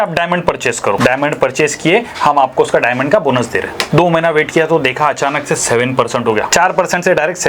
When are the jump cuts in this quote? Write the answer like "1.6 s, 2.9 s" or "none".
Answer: 1.0 s, 3.8 s, 6.5 s